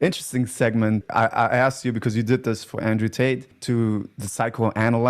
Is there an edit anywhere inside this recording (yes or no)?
yes